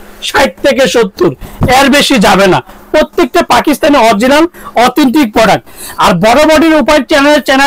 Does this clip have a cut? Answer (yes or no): no